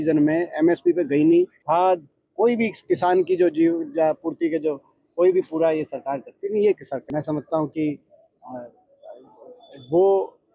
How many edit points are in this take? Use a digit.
2